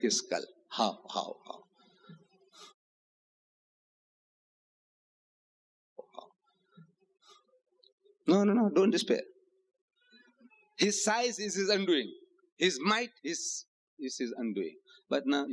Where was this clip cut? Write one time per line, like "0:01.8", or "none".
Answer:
none